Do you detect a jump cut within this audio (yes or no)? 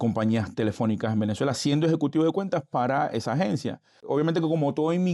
yes